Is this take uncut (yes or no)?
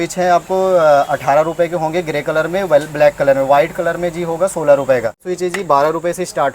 no